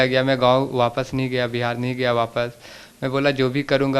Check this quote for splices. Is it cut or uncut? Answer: uncut